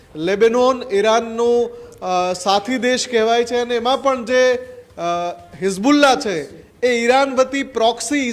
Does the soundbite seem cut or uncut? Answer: uncut